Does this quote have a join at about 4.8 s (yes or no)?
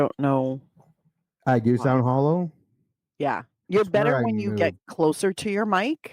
no